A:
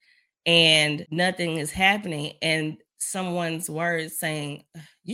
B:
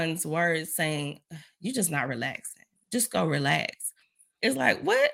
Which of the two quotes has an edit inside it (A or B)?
A